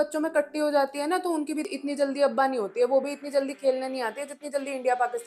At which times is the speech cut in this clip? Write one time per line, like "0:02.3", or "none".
0:01.7